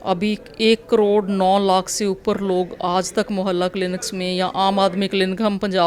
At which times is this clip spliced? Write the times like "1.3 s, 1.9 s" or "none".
none